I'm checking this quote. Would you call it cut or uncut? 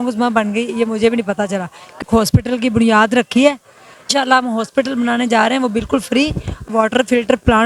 cut